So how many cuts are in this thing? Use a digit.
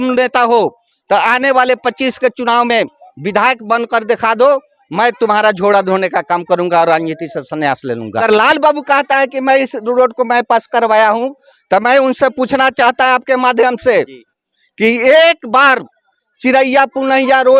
1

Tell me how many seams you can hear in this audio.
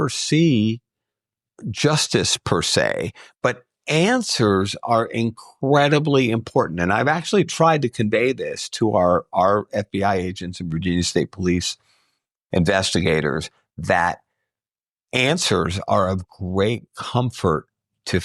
0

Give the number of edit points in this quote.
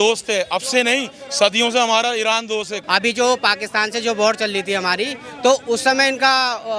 1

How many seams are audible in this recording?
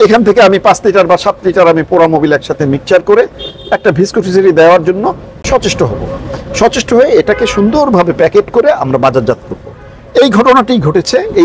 0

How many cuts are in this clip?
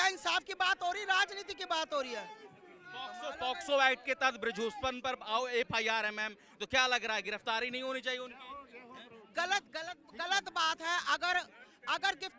0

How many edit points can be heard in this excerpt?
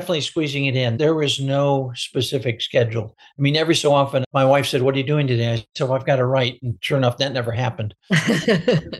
2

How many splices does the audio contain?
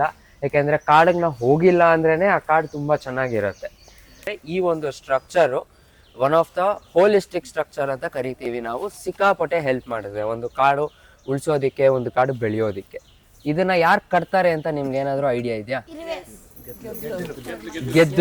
1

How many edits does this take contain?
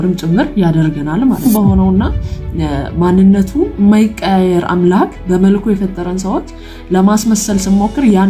1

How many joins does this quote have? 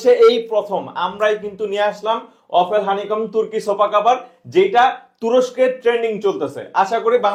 0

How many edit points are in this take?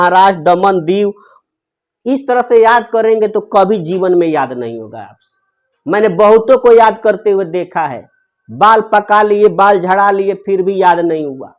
0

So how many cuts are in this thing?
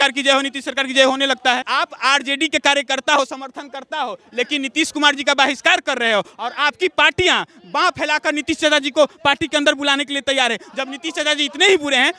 1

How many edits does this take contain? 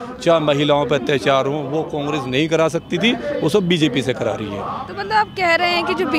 0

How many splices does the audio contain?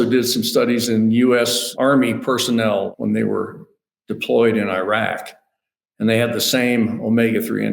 2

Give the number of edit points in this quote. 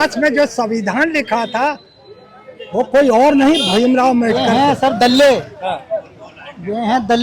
1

